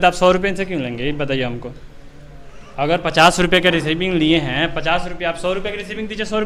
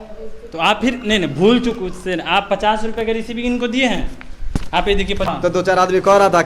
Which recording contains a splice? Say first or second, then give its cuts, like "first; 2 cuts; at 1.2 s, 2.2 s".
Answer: second; 1 cut; at 5.3 s